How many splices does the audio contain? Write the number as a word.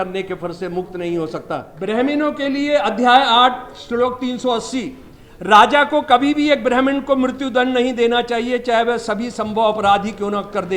one